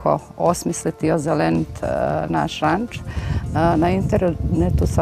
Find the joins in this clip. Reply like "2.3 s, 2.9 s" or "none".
none